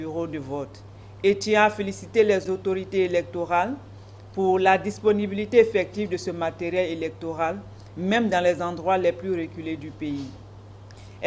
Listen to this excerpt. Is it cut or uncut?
cut